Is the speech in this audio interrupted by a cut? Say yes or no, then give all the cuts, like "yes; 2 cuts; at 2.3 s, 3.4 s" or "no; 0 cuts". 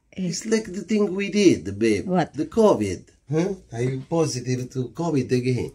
yes; 1 cut; at 3.2 s